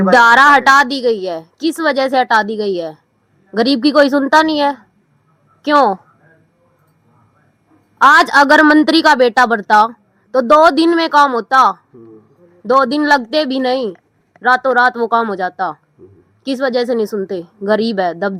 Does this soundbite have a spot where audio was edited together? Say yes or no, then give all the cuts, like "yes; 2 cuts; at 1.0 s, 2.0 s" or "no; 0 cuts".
no; 0 cuts